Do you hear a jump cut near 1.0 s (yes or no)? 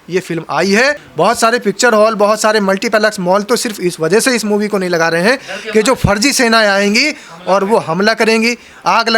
yes